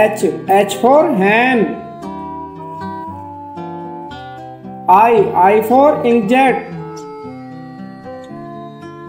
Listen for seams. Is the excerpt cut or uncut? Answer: uncut